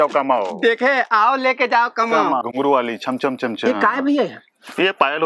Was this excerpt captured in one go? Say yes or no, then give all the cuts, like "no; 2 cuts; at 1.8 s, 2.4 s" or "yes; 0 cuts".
yes; 0 cuts